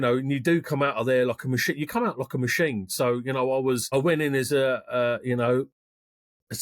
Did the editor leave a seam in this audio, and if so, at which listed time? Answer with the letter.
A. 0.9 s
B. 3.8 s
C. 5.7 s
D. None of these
B